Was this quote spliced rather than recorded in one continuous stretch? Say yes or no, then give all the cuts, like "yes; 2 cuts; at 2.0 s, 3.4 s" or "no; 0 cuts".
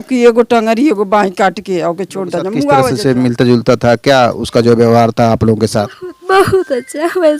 yes; 1 cut; at 2.9 s